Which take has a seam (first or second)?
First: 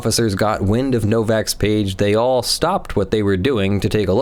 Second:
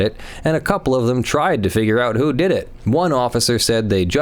second